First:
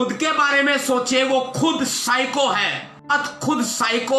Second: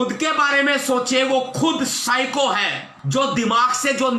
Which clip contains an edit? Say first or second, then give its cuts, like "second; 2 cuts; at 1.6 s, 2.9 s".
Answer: second; 1 cut; at 2.9 s